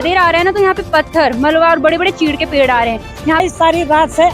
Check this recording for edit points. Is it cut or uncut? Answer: cut